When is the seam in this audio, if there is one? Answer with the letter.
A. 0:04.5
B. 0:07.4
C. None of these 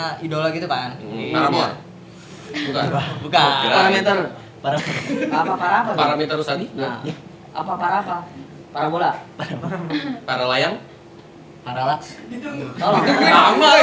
C